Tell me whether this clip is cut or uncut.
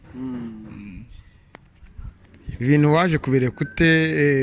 uncut